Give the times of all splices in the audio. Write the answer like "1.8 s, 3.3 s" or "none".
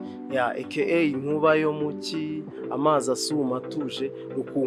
none